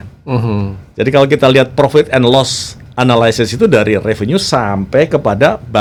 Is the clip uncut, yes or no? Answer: yes